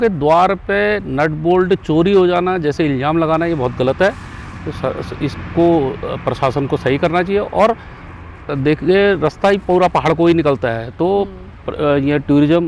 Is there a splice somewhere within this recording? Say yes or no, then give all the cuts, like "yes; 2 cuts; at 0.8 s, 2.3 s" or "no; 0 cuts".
no; 0 cuts